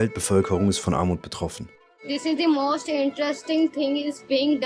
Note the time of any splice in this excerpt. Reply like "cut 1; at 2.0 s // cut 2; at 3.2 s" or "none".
cut 1; at 2.0 s